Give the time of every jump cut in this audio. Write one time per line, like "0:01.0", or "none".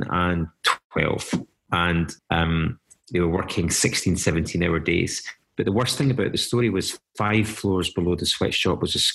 0:05.3